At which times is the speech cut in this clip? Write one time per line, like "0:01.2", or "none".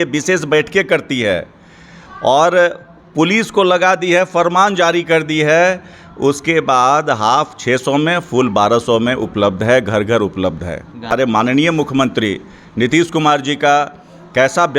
0:11.1